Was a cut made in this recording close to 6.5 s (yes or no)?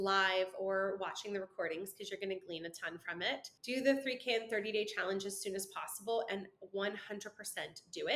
no